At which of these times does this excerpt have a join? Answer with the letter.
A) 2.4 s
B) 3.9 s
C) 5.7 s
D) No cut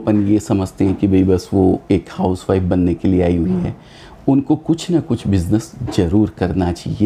D